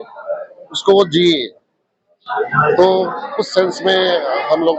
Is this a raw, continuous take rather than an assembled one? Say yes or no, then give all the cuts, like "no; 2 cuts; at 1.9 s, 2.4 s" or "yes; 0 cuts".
yes; 0 cuts